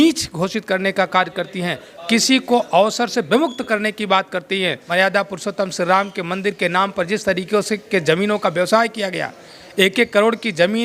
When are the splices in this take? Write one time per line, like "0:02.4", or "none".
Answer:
0:04.8

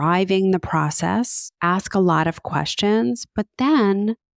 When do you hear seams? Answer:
0:01.4

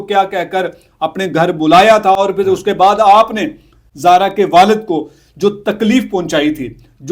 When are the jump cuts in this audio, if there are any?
none

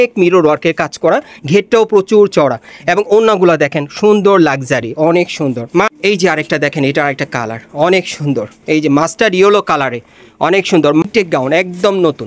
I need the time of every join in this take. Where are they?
0:05.9
0:11.0

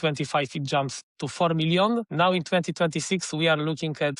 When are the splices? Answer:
0:02.1

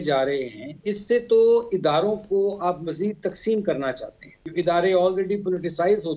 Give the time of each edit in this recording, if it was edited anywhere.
0:04.4

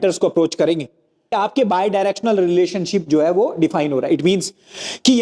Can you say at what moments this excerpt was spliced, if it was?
0:01.3

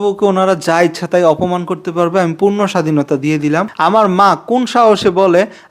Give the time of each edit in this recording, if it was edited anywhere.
0:03.7

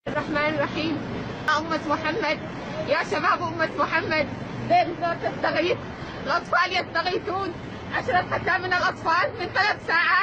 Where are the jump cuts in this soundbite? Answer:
0:01.5

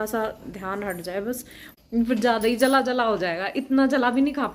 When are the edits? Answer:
0:01.6

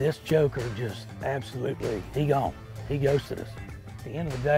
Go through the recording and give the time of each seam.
0:02.1
0:03.8

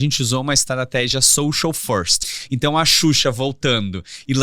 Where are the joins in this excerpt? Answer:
0:02.2

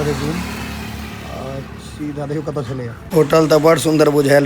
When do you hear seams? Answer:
0:03.0

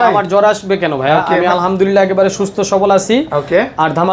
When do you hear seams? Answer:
none

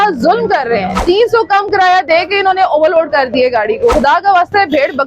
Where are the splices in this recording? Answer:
0:00.9
0:03.9

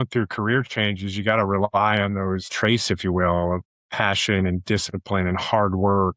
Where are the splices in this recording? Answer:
0:02.5
0:03.7

